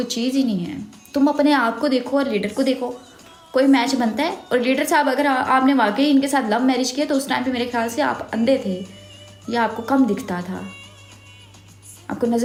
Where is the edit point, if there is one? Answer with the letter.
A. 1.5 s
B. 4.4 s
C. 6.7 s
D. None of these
D